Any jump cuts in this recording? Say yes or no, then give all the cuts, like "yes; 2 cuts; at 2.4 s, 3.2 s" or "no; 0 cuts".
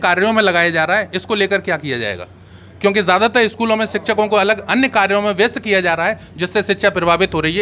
no; 0 cuts